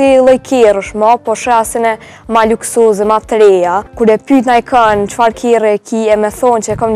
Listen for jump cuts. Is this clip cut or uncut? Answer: cut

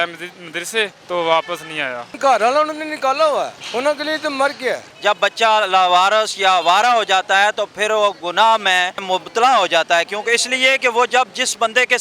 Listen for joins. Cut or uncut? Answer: cut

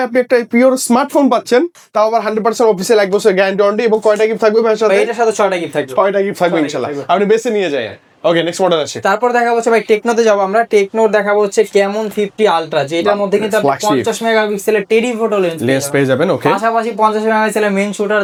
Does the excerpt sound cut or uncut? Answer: uncut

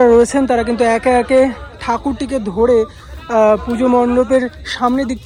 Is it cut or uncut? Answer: uncut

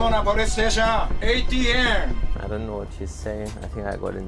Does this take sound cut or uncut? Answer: uncut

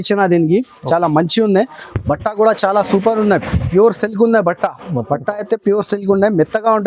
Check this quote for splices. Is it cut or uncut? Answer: uncut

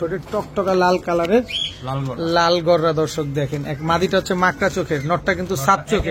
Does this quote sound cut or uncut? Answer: uncut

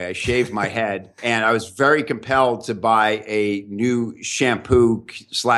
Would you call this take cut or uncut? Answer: cut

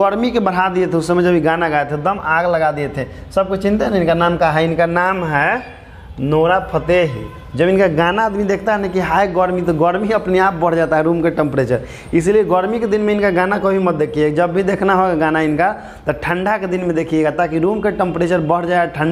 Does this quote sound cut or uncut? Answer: uncut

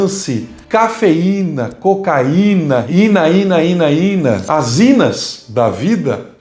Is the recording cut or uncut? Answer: cut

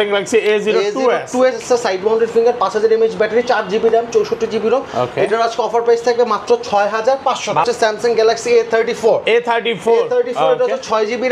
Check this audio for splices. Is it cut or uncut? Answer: cut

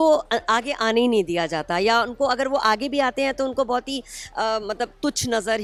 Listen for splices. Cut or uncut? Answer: uncut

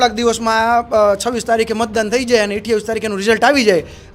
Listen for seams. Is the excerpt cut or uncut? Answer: uncut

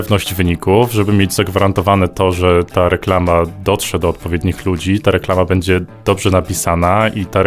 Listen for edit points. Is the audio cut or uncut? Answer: uncut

